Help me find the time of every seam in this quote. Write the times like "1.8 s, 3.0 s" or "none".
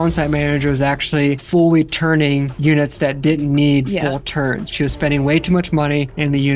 none